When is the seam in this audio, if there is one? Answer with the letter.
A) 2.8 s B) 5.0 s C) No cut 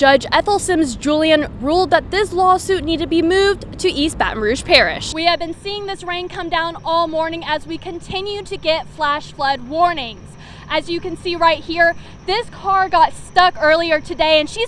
B